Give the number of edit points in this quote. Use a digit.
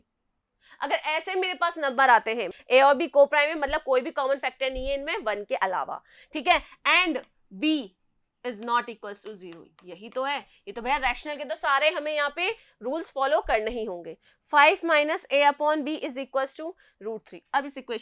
2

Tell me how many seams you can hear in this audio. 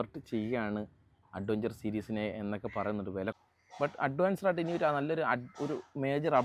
1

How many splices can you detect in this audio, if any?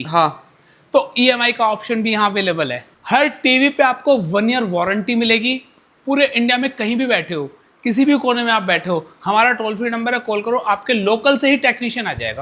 1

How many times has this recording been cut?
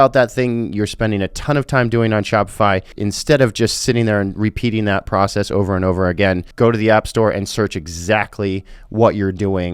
2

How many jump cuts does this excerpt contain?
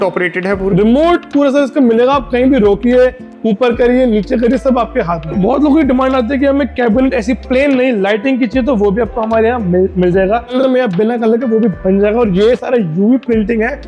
2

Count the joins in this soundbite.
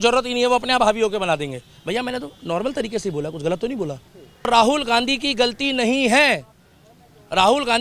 1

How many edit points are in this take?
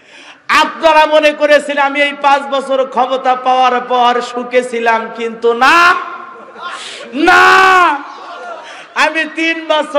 0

